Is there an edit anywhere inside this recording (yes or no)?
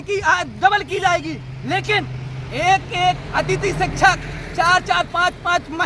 no